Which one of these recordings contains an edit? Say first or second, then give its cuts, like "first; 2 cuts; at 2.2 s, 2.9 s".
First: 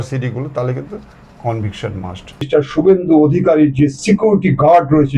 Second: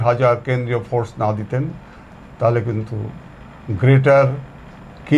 first; 1 cut; at 2.5 s